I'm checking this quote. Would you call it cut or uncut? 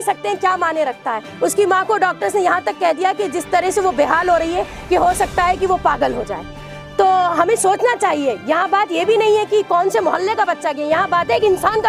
uncut